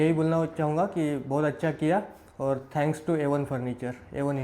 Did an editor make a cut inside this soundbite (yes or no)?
no